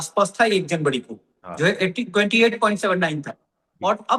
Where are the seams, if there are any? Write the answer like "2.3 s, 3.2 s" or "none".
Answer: none